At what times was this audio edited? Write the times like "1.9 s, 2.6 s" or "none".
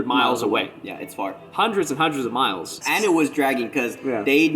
2.8 s